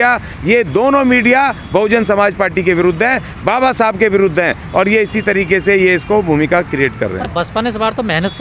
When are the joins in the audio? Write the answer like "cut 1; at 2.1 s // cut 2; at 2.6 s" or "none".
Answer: none